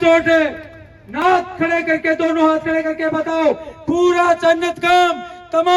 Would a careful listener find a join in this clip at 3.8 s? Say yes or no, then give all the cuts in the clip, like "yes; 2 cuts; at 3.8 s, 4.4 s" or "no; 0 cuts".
no; 1 cut; at 1.0 s